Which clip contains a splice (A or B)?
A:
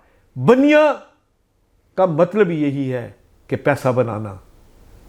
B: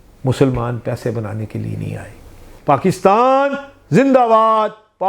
B